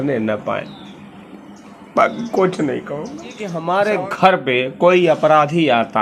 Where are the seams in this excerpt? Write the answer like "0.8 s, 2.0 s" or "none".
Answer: 3.5 s